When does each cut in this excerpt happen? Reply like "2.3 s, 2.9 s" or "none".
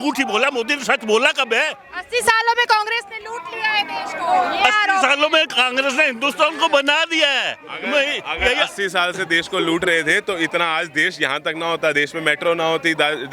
none